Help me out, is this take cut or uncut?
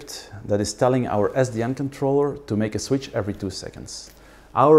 uncut